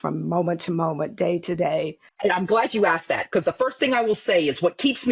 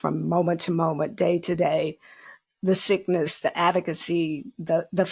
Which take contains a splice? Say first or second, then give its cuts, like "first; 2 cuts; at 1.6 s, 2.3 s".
first; 1 cut; at 2.0 s